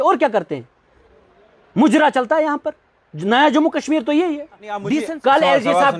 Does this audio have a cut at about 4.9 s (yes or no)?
yes